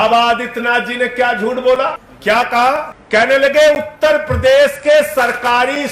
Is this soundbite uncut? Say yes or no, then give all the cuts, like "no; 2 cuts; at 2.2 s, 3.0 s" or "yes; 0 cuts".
no; 2 cuts; at 2.1 s, 3.0 s